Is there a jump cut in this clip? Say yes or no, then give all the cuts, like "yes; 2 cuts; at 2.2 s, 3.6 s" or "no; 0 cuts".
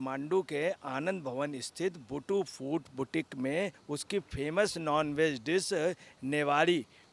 yes; 1 cut; at 3.8 s